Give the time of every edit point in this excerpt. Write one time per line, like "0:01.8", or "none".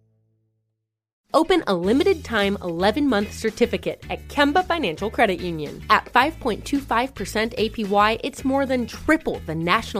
0:01.1

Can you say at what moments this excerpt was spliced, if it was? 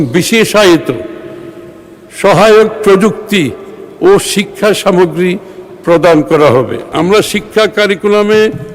0:06.8

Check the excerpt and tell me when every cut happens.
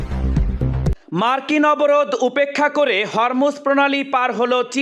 0:01.0

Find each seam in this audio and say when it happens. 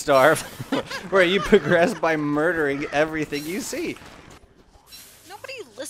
0:04.4

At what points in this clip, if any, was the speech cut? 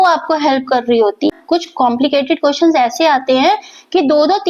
0:01.4

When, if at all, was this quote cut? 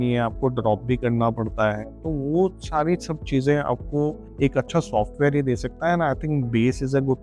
0:04.2

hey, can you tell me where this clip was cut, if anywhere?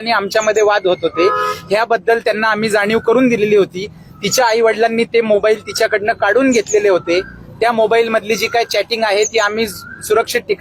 none

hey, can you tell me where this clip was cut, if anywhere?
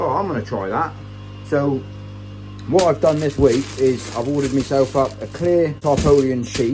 none

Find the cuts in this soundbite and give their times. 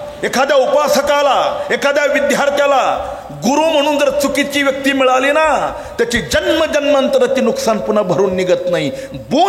none

